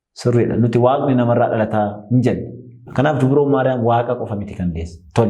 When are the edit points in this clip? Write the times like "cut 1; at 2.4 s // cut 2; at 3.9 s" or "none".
cut 1; at 2.8 s